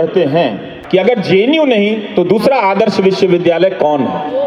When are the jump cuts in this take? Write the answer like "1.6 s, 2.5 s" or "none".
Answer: 1.1 s